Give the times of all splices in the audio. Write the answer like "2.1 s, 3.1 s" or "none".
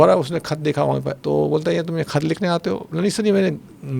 1.1 s, 2.9 s